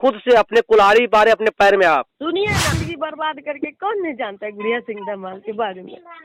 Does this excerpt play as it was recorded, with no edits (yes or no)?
no